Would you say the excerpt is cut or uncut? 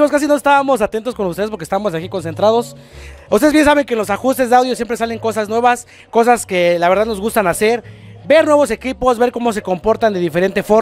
uncut